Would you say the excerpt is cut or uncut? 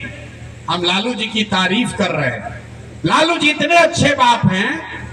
uncut